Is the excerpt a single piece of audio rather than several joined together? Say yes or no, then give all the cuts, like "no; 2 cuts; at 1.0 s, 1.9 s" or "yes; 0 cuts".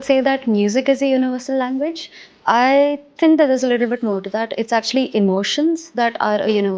yes; 0 cuts